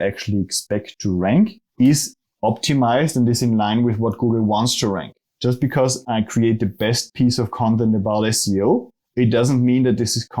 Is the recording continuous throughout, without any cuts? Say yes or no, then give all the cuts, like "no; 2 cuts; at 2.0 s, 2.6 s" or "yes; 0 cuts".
no; 2 cuts; at 1.6 s, 9.0 s